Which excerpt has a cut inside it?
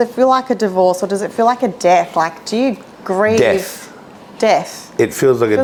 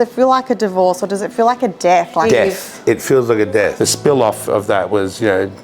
second; 2 cuts; at 2.5 s, 3.7 s

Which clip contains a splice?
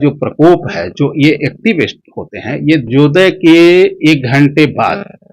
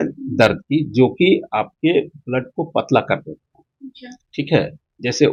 first; 1 cut; at 2.9 s

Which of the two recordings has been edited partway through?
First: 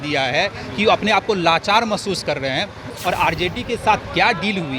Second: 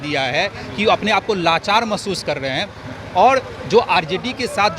first; 1 cut; at 2.8 s

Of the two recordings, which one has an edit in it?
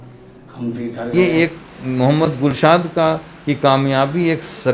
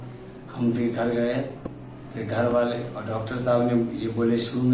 first; 1 cut; at 1.1 s

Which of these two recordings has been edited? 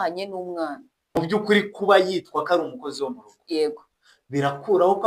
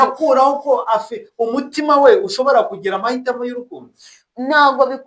first; 1 cut; at 1.1 s

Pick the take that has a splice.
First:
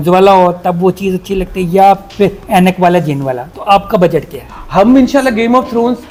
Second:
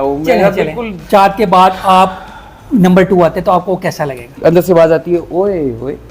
second; 2 cuts; at 1.0 s, 4.3 s

